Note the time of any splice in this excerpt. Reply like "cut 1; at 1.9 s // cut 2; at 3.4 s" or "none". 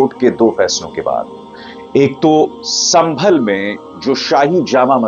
none